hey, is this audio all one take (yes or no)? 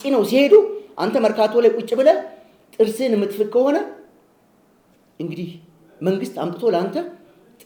yes